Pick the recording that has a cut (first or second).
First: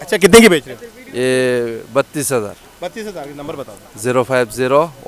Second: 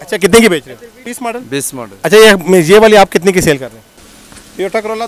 second